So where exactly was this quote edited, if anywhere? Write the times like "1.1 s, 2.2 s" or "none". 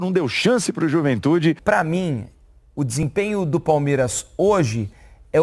1.6 s